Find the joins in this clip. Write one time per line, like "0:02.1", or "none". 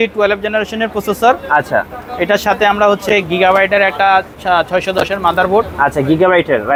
none